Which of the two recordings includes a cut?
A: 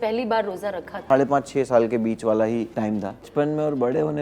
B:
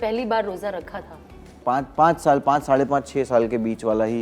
A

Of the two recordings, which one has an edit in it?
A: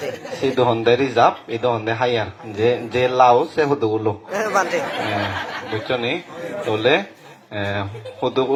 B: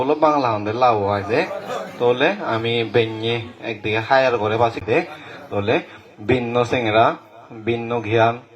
B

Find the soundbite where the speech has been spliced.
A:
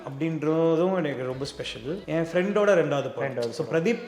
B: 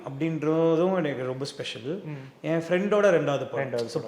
A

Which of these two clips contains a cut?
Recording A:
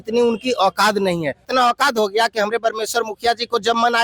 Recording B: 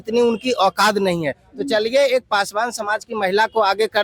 A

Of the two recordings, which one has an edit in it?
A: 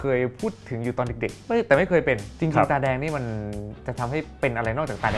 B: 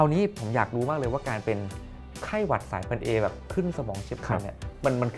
A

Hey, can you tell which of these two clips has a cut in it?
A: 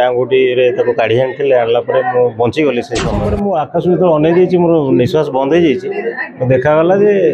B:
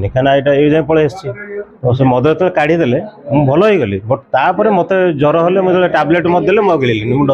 A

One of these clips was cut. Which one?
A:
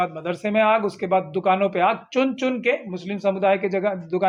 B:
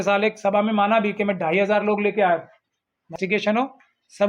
B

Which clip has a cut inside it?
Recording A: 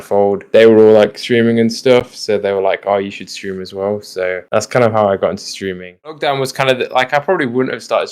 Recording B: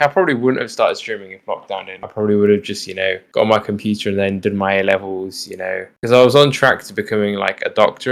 A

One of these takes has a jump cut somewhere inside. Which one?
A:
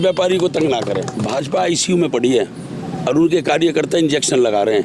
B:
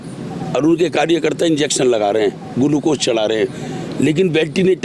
A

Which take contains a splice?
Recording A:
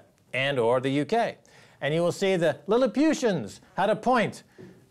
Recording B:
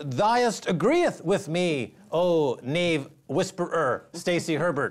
A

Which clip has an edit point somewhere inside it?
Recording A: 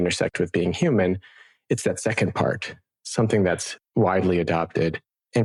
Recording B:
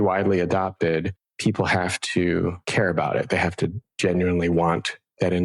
B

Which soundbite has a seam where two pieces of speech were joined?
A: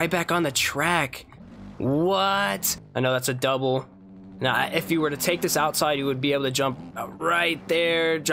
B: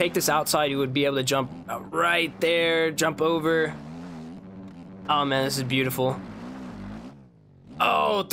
A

